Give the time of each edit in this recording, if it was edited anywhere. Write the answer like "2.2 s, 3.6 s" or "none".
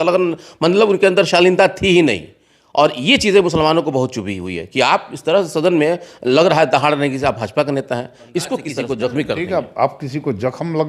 8.7 s